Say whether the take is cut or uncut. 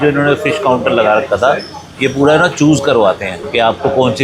uncut